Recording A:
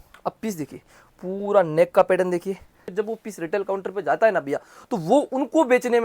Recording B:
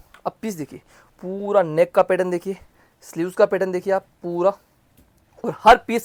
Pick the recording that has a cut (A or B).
A